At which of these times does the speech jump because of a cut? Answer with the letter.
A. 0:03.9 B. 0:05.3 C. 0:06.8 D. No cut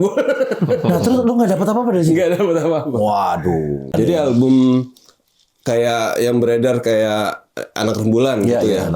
A